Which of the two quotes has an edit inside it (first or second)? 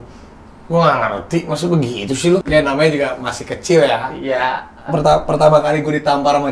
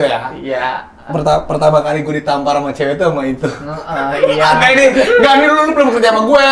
first